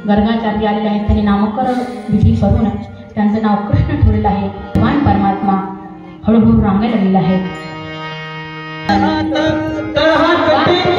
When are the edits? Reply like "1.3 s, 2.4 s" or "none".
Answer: 4.7 s, 8.9 s